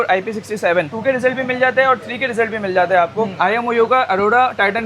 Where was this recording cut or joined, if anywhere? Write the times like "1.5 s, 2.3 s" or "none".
0.9 s, 3.4 s